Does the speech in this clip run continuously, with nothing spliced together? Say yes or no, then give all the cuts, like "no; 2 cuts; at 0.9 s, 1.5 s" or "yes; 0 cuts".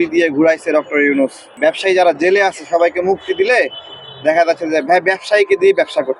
no; 1 cut; at 1.4 s